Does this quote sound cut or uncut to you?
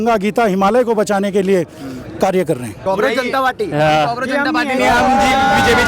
cut